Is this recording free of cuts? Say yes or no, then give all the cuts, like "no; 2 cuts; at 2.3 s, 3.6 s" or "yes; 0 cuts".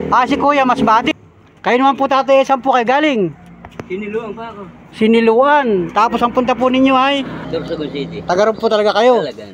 no; 2 cuts; at 1.1 s, 7.4 s